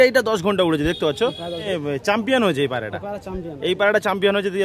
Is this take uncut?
no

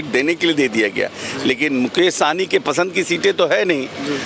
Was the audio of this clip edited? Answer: no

